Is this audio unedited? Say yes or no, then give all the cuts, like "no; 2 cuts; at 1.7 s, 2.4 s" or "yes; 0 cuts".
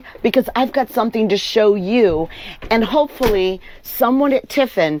yes; 0 cuts